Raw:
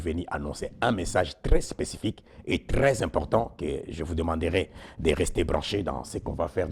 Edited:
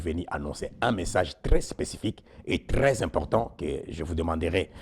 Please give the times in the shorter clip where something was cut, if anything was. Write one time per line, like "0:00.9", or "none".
none